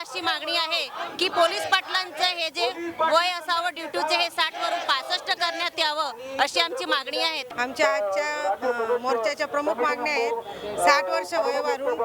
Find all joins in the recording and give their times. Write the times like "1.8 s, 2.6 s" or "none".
7.5 s